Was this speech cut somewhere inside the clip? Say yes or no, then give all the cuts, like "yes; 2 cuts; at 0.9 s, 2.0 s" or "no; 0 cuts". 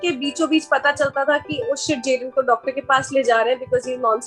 no; 0 cuts